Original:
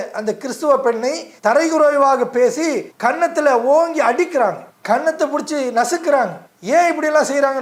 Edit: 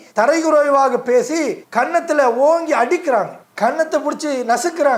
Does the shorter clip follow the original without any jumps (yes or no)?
yes